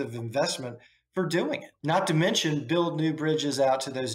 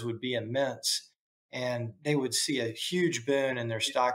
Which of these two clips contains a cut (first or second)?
first